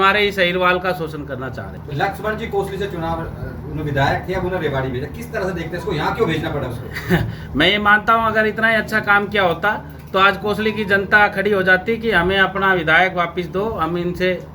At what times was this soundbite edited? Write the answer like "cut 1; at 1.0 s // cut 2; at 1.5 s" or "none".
none